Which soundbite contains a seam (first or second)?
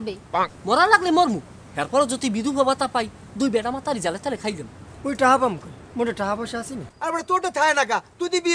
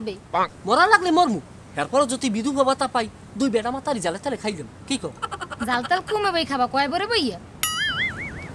first